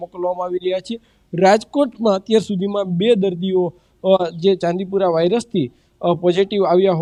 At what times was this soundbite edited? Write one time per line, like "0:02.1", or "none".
none